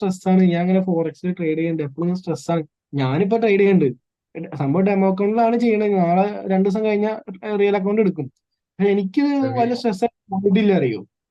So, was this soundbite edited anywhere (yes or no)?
no